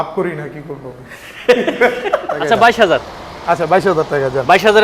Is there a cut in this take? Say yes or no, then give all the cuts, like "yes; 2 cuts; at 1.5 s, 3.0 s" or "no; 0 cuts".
yes; 1 cut; at 2.4 s